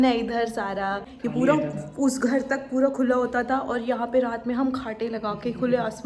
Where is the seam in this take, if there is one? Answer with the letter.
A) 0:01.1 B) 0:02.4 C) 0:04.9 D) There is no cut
A